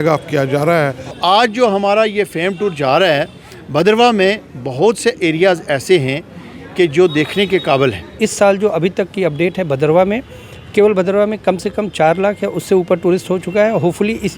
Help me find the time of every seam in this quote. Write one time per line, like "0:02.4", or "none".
0:01.2
0:08.1